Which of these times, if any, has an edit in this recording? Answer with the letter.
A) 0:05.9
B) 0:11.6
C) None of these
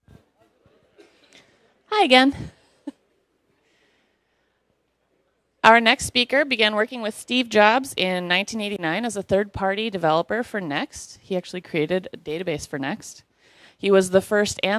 B